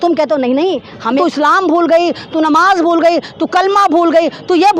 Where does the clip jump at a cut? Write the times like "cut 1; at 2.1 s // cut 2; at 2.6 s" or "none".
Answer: cut 1; at 1.2 s

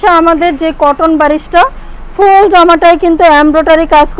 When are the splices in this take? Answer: none

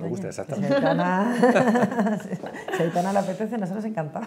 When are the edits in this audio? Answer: none

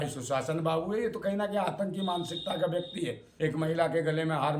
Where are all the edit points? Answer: cut 1; at 3.2 s

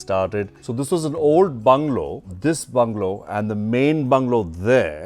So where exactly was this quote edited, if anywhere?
none

